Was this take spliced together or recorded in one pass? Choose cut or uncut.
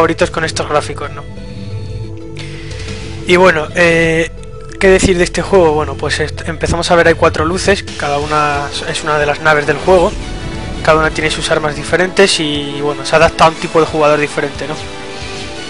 cut